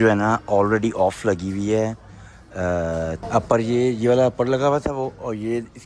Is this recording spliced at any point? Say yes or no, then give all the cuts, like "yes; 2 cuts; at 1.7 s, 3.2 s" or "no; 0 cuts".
yes; 1 cut; at 3.2 s